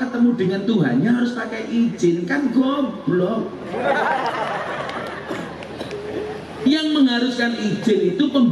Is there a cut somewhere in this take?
no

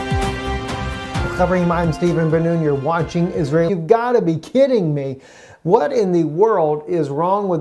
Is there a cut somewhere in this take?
no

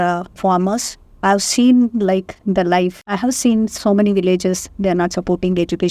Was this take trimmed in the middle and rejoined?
yes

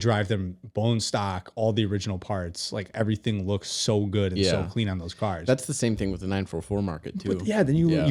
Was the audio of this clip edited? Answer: no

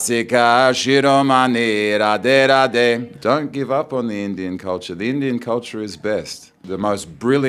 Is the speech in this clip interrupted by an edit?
yes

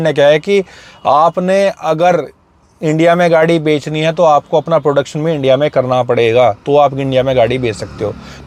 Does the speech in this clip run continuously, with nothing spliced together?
yes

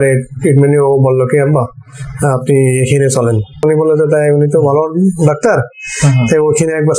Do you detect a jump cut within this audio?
yes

